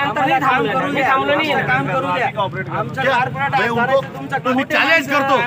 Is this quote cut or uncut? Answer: cut